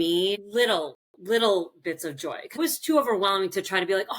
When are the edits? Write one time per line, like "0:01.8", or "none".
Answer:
0:02.6

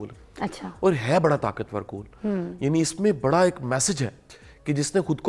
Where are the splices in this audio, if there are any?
none

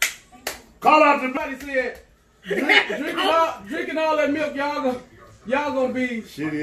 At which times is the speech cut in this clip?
0:01.3

